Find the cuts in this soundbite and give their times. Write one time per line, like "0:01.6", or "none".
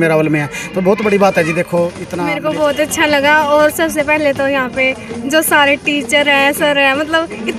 0:02.2